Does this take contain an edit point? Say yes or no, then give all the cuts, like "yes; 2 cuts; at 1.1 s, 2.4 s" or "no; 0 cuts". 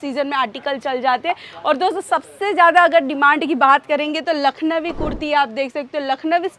no; 0 cuts